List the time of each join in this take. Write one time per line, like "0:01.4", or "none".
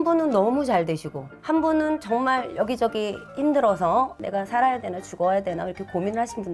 none